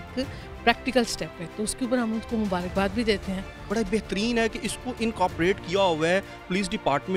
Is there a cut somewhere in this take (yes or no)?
yes